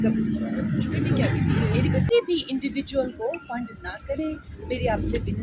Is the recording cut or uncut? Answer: cut